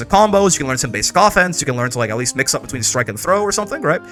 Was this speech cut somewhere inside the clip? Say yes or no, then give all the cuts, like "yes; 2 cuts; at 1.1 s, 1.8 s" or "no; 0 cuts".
no; 0 cuts